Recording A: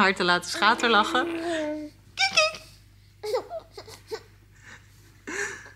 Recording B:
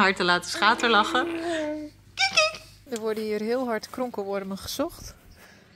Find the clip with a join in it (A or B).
B